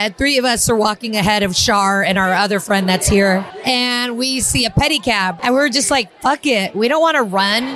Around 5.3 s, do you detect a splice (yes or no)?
yes